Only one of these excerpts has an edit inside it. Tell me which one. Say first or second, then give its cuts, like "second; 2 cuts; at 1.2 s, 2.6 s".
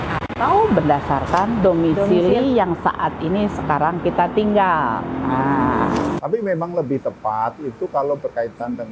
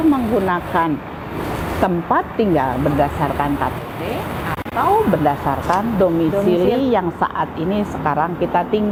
first; 1 cut; at 6.2 s